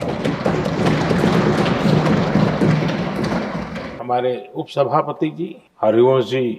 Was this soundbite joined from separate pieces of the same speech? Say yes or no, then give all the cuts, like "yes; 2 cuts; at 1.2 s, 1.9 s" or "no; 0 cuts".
yes; 2 cuts; at 3.9 s, 5.6 s